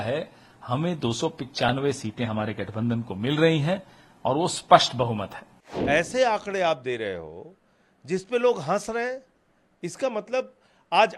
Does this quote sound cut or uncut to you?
cut